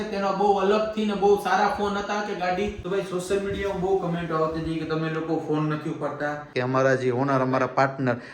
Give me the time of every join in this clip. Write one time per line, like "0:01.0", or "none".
0:02.8
0:06.5